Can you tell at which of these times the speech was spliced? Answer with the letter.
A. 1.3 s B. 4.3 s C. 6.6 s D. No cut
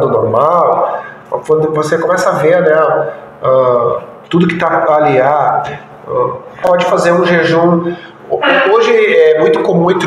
C